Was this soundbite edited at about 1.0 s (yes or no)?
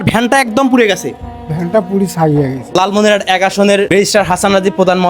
no